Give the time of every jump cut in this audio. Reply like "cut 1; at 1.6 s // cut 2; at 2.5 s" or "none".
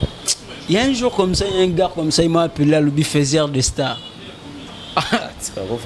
none